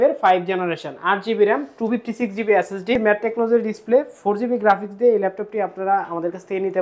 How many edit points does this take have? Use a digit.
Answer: 1